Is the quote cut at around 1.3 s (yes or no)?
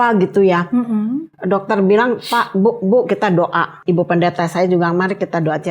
no